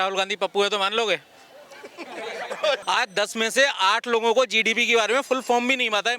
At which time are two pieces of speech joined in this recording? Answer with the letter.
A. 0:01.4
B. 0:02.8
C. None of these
B